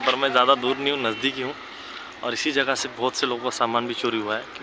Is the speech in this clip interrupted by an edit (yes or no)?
no